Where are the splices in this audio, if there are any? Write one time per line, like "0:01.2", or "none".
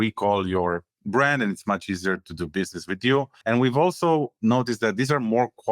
0:03.3

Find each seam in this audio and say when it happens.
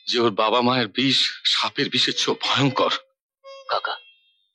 none

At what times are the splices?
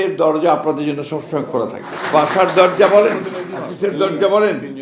0:01.9

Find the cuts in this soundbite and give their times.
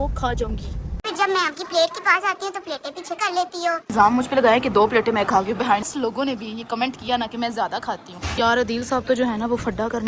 0:01.0
0:03.9
0:05.9
0:08.2

